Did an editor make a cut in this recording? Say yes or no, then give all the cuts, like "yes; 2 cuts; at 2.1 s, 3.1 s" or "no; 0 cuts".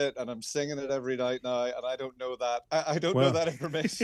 no; 0 cuts